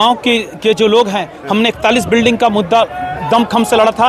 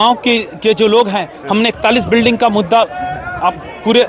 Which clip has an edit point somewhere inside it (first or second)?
first